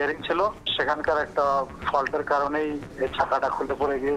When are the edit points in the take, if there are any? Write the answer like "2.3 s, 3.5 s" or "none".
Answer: none